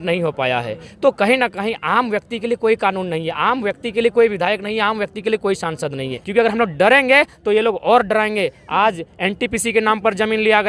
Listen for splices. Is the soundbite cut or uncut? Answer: cut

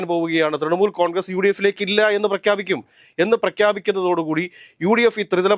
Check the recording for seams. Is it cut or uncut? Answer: uncut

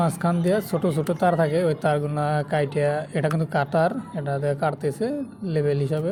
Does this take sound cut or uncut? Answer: uncut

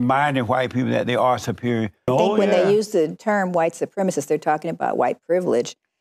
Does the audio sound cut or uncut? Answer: cut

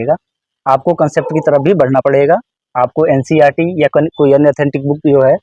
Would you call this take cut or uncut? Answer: uncut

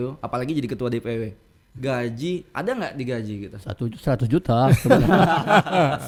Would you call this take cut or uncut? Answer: uncut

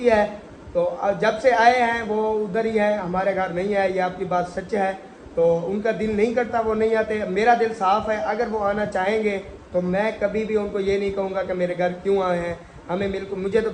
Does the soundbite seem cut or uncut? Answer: uncut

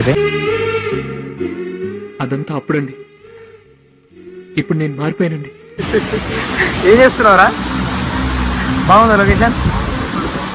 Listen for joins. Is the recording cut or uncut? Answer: uncut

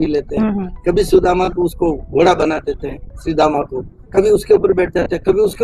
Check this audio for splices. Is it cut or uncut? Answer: uncut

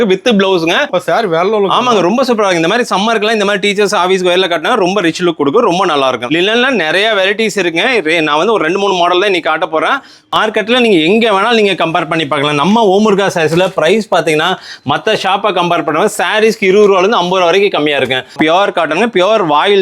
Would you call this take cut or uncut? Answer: cut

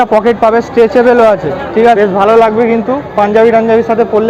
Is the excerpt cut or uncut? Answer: cut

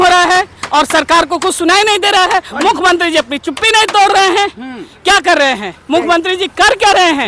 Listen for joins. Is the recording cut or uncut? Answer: uncut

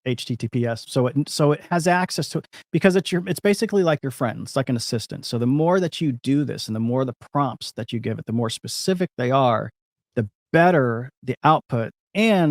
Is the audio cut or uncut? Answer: uncut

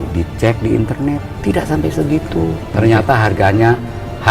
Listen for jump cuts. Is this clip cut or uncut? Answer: uncut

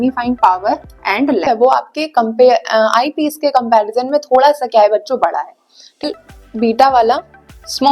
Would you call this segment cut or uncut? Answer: cut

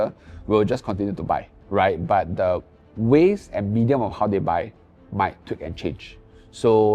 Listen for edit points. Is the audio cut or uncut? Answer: uncut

